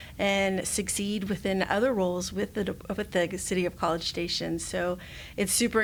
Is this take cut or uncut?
uncut